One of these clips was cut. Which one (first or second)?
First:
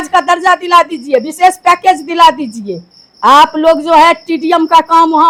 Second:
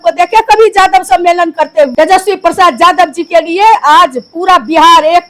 second